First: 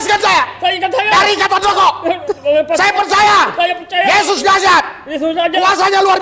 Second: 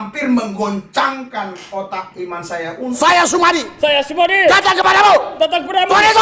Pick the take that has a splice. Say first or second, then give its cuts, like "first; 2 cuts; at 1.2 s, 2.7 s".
second; 1 cut; at 3.0 s